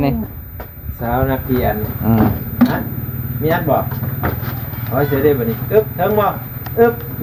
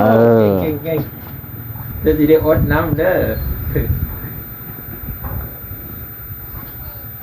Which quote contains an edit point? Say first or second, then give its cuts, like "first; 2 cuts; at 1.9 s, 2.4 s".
second; 1 cut; at 1.8 s